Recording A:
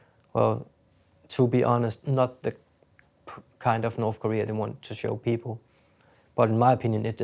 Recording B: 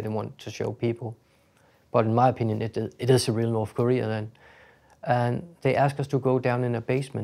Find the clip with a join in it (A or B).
A